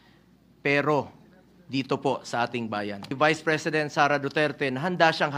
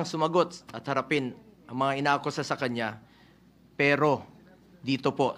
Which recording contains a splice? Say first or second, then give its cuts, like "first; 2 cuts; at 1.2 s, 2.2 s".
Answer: first; 1 cut; at 3.1 s